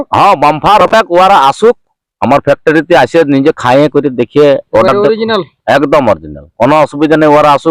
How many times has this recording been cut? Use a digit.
0